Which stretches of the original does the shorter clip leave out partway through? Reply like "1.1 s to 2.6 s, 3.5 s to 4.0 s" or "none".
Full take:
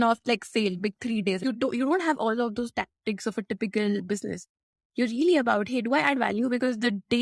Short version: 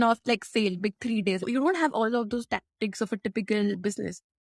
1.4 s to 1.7 s